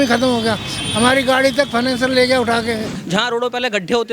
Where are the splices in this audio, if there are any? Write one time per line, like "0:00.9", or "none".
0:02.9